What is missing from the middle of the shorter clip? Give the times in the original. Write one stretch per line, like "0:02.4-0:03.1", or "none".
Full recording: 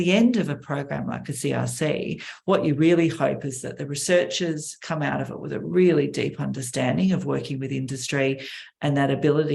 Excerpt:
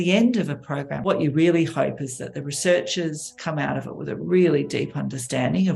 0:00.9-0:02.4